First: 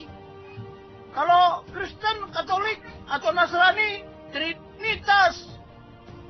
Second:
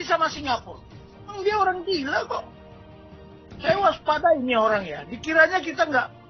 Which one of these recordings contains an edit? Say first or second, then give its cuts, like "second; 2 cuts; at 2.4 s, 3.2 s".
second; 1 cut; at 1.3 s